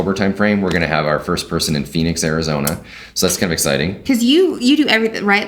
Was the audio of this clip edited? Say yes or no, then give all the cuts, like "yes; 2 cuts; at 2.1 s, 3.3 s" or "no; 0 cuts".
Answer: yes; 1 cut; at 4.0 s